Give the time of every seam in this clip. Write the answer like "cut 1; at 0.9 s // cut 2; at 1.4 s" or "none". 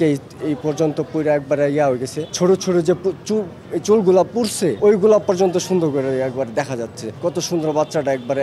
cut 1; at 2.2 s // cut 2; at 4.8 s // cut 3; at 7.0 s